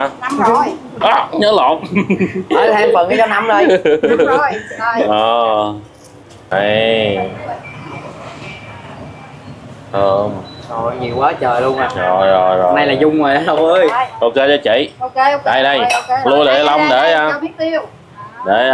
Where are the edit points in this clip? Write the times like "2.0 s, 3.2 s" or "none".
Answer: 6.5 s